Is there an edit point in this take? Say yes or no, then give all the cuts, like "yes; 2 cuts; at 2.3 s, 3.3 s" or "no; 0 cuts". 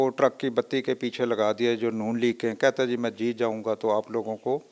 no; 0 cuts